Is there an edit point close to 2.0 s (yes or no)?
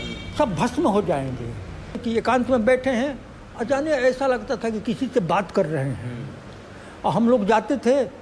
yes